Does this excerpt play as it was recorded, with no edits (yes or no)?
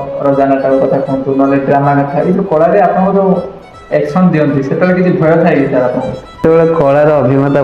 no